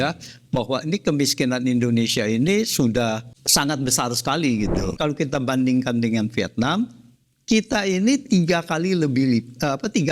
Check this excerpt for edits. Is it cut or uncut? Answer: cut